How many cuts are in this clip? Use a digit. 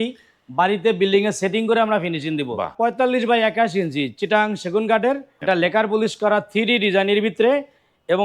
2